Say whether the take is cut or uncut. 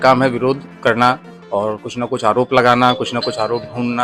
cut